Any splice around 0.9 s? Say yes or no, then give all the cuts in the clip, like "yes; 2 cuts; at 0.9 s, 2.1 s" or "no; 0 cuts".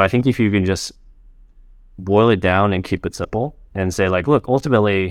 no; 0 cuts